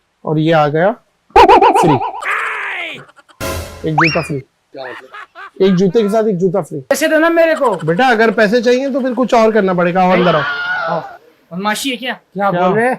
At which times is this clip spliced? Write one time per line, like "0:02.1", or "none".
0:06.8